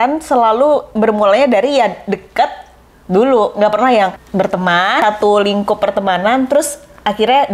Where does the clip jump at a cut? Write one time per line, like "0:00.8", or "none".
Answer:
0:04.8

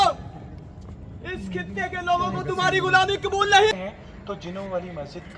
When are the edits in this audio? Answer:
0:03.7

